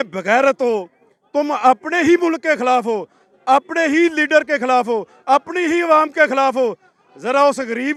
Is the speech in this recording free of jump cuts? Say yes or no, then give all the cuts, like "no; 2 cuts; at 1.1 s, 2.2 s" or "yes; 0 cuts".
yes; 0 cuts